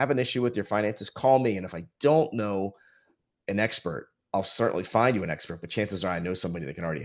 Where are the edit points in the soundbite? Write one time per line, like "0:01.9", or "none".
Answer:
none